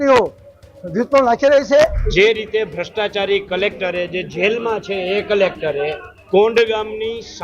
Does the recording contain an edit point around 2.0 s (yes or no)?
yes